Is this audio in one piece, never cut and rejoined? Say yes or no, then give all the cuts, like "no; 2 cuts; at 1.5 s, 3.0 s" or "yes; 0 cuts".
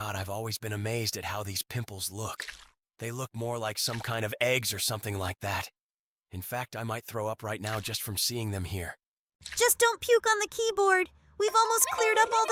yes; 0 cuts